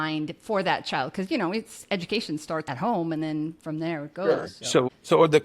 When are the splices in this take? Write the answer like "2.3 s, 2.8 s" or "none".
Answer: 2.7 s

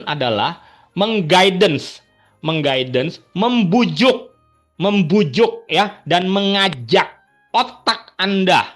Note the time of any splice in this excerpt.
none

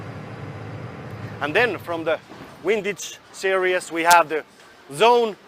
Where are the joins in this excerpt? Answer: 1.0 s

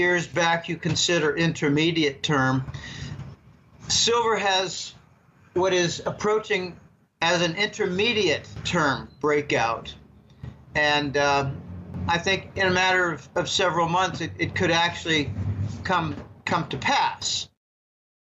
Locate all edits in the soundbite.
9.8 s

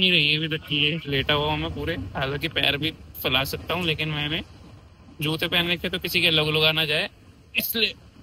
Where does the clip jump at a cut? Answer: 1.1 s

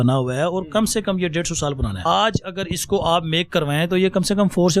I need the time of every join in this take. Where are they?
2.0 s

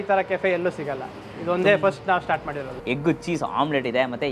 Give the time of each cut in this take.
2.8 s

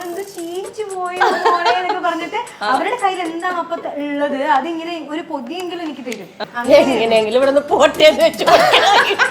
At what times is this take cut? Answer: 6.4 s

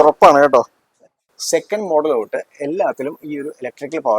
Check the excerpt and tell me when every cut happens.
0.9 s

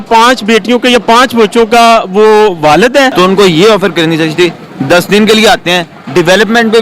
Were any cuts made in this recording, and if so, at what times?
3.1 s

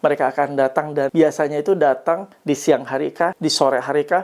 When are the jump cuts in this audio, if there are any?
1.1 s, 3.4 s

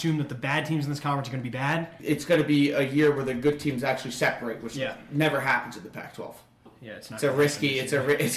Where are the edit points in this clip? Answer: 2.0 s, 6.8 s

